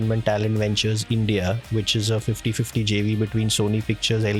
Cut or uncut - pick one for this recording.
uncut